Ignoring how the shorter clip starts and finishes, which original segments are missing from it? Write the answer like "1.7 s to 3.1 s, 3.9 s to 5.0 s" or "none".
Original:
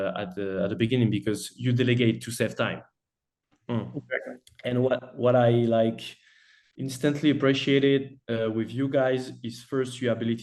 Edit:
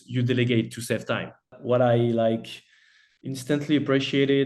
3.1 s to 5.1 s